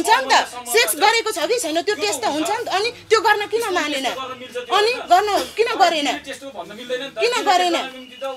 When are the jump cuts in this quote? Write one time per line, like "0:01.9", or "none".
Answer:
none